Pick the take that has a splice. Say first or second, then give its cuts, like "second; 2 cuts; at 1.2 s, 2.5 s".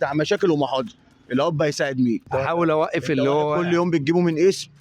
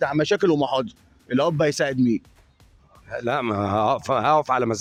first; 1 cut; at 2.3 s